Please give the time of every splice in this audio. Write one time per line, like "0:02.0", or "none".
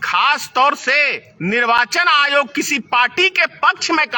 0:01.2